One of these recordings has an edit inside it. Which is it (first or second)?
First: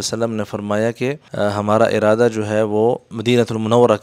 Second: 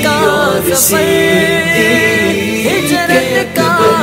first